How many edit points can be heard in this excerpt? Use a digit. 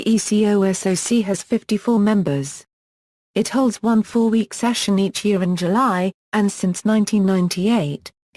1